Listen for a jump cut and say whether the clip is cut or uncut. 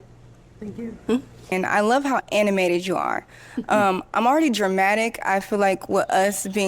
cut